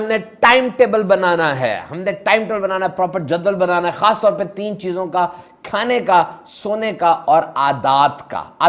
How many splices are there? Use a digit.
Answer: 0